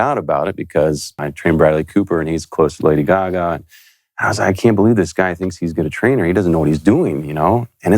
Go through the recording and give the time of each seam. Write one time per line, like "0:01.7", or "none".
0:01.1